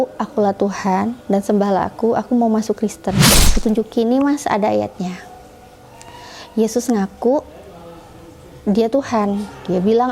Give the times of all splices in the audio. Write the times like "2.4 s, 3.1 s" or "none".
3.4 s

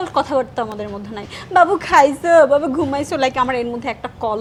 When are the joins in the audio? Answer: none

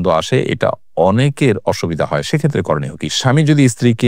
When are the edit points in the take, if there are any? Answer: 3.1 s

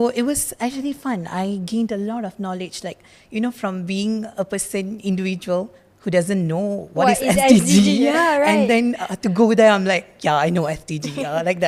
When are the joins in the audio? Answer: none

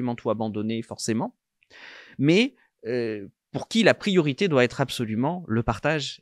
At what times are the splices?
none

